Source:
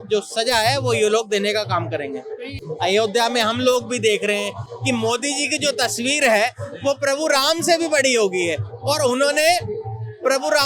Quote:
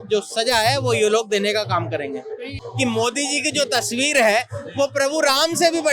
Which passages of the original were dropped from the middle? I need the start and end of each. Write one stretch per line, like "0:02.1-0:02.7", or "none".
0:02.6-0:04.6